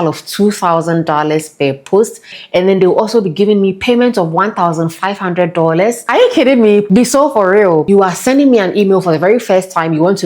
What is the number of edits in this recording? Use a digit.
4